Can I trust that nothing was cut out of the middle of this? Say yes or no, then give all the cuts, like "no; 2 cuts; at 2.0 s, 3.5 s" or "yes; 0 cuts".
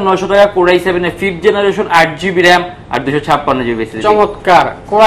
yes; 0 cuts